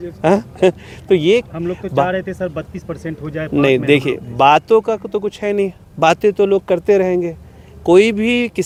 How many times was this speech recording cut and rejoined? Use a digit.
0